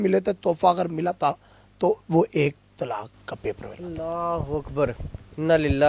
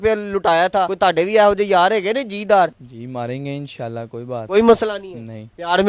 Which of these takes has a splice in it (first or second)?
second